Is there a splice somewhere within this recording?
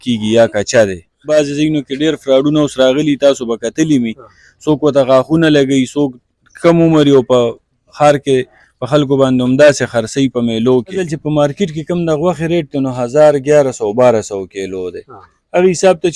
yes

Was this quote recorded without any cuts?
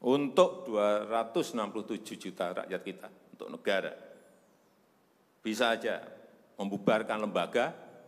yes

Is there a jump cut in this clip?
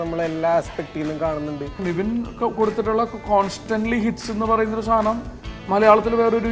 yes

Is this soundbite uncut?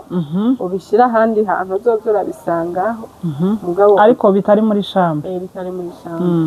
yes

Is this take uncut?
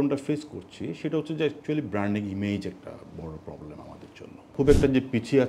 no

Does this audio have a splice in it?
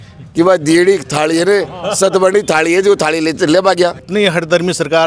yes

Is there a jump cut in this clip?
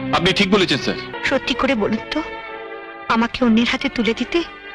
yes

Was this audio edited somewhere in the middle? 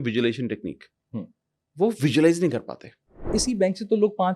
yes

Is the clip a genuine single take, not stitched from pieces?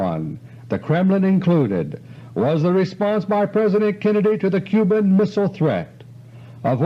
yes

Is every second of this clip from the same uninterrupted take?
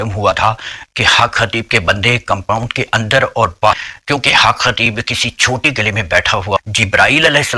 no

